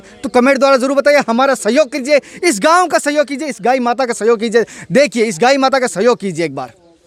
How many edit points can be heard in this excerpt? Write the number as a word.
zero